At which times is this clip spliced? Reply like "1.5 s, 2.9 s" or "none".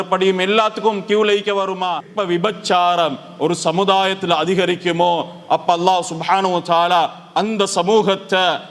2.1 s